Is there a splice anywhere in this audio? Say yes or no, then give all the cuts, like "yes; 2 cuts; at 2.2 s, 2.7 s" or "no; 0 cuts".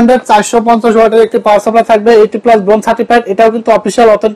no; 0 cuts